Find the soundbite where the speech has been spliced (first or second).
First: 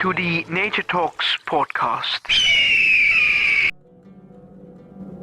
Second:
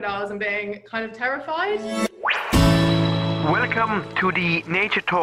first